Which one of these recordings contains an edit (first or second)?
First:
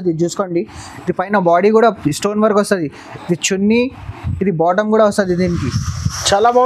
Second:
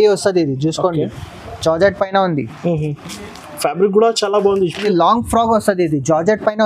second